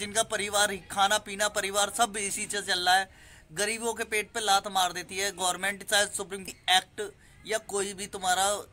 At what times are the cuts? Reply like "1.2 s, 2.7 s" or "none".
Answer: 6.5 s

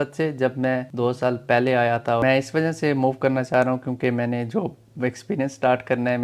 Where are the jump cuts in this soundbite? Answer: 0.9 s, 2.2 s

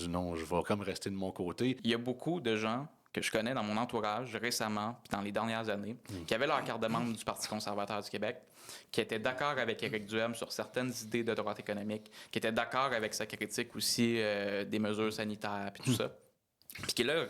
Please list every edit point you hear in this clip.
1.8 s

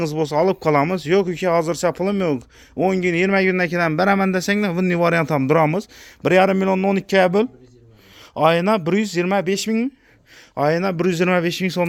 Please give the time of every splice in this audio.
none

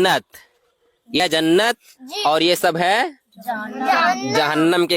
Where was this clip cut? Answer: 1.2 s

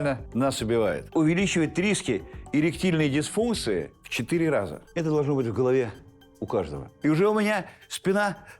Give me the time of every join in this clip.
1.0 s, 4.8 s

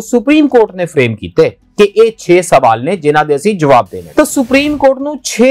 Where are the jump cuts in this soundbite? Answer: 4.0 s

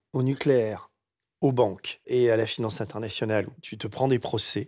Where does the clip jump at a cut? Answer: 2.1 s, 3.6 s

